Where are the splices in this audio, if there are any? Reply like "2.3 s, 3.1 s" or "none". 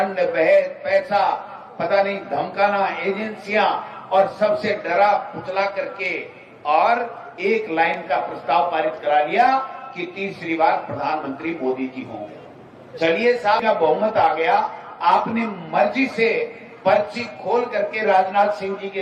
none